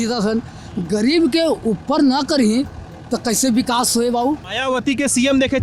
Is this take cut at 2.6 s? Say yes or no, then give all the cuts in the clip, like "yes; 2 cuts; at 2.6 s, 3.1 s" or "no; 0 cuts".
no; 1 cut; at 4.5 s